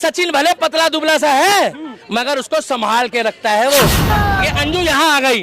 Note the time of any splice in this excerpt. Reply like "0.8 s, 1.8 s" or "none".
4.1 s